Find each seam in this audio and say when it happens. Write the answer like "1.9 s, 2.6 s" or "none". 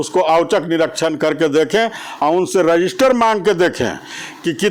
none